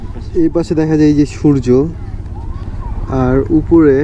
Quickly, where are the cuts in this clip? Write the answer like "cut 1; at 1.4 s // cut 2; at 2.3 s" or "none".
none